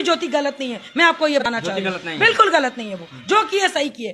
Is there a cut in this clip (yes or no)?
yes